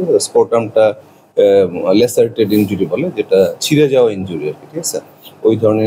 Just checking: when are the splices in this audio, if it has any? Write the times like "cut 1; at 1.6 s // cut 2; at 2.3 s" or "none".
none